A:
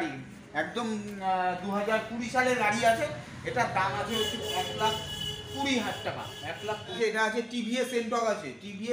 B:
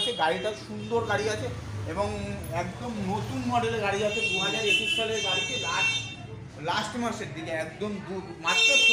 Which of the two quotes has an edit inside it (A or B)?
A